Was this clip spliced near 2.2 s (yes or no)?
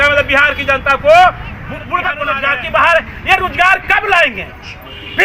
yes